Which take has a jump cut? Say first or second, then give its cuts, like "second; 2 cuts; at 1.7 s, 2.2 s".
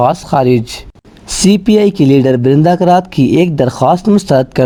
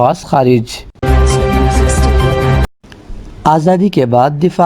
second; 2 cuts; at 1.0 s, 2.7 s